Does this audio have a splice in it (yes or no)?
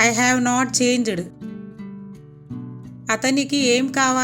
yes